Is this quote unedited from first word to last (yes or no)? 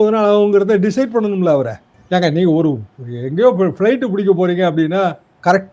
yes